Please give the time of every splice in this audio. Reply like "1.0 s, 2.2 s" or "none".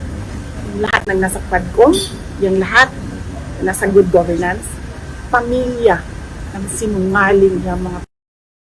none